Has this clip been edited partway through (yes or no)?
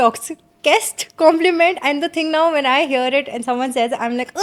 no